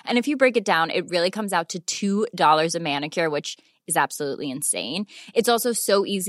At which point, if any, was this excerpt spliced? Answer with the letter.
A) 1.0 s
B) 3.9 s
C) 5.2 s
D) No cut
D